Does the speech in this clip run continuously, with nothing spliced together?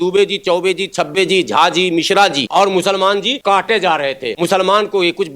no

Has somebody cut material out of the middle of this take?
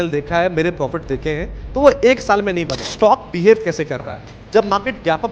yes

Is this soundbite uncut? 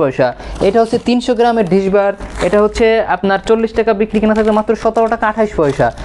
yes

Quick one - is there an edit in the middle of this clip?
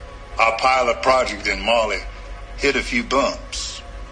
no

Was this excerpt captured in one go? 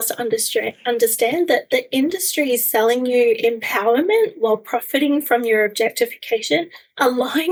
yes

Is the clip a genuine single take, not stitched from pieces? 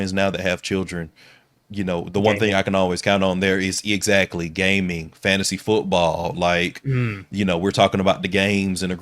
no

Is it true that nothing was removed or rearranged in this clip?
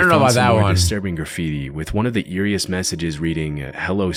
yes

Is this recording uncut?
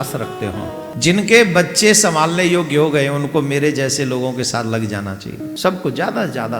no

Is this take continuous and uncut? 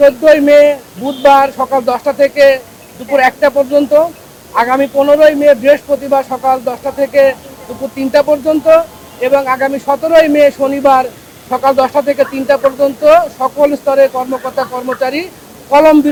yes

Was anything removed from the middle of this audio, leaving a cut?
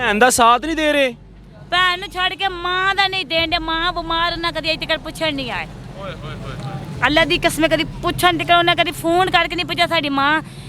no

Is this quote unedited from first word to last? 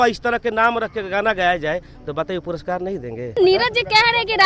no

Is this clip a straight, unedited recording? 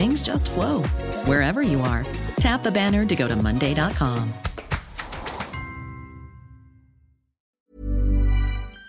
no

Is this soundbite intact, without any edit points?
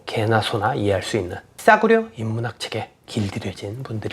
no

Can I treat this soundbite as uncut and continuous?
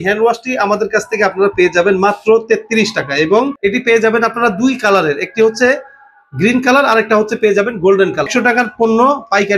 no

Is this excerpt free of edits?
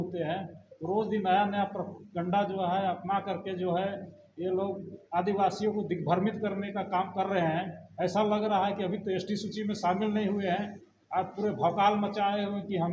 yes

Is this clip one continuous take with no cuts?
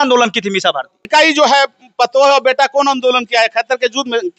no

